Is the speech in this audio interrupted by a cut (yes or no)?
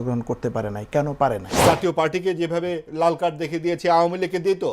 yes